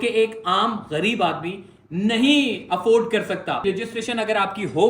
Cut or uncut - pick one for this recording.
cut